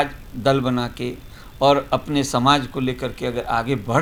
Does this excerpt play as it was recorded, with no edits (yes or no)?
yes